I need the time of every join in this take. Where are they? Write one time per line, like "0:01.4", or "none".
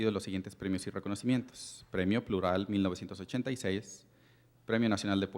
0:02.2